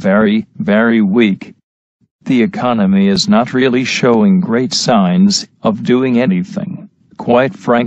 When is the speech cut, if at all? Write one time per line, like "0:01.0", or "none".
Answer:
none